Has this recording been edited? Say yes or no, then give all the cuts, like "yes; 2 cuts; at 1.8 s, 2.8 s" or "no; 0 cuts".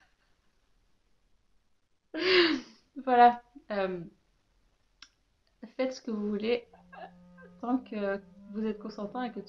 no; 0 cuts